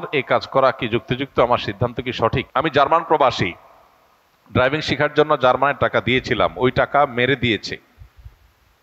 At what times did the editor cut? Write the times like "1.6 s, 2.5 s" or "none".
2.5 s